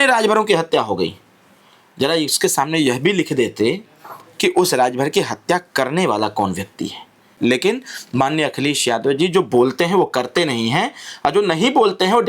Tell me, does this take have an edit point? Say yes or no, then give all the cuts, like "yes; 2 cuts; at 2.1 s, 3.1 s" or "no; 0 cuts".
yes; 1 cut; at 7.3 s